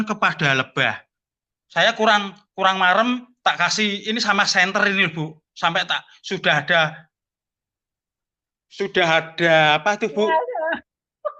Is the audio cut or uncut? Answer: uncut